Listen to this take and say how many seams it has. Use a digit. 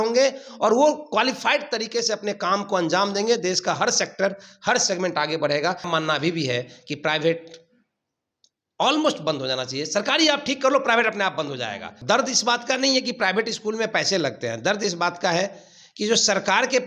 2